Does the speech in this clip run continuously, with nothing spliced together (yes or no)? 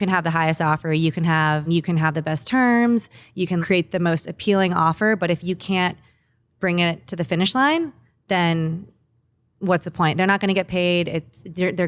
no